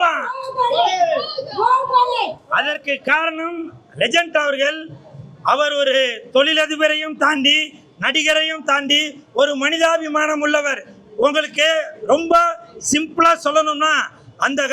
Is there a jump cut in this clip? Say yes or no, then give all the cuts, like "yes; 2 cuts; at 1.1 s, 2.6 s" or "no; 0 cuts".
no; 0 cuts